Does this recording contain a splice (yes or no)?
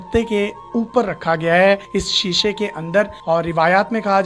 no